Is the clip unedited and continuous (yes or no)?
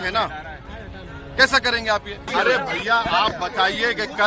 no